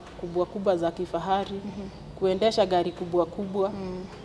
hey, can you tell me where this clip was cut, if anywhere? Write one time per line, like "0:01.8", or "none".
none